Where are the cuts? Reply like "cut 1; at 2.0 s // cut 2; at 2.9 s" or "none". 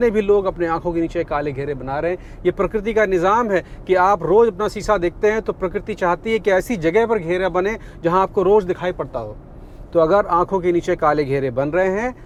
none